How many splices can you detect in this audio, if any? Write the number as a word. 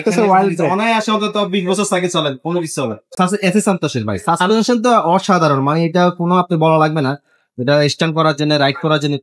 one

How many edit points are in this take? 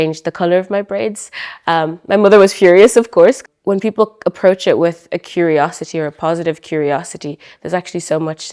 one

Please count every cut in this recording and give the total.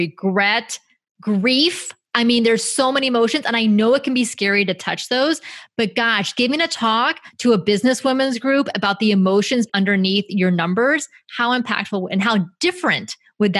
one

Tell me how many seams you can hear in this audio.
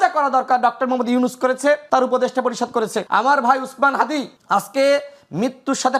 three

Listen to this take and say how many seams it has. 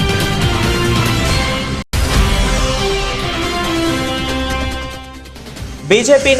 one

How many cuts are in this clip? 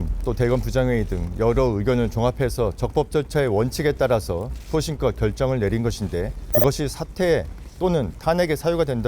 one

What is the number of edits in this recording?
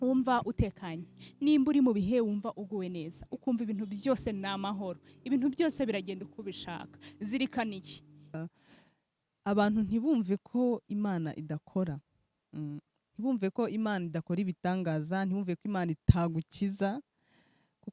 one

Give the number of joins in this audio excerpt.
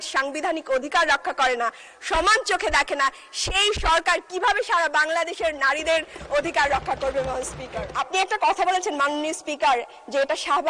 one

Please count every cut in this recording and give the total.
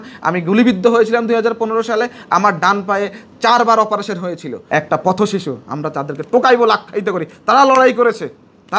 one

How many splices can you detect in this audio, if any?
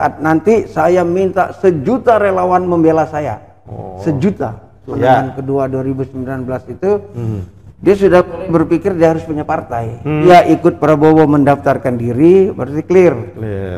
two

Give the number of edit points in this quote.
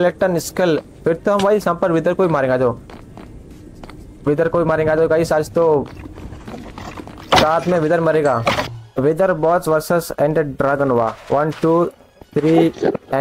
one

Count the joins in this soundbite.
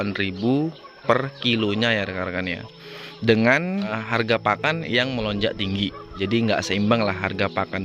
two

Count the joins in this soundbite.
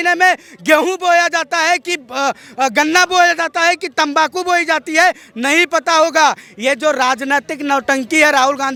zero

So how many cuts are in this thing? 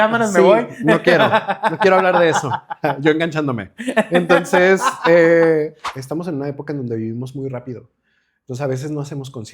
one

